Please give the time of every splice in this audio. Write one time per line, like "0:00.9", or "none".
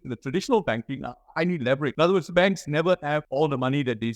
0:01.9
0:03.3